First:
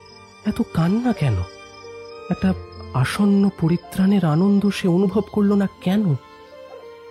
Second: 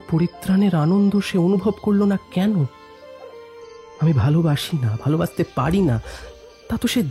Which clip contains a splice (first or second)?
first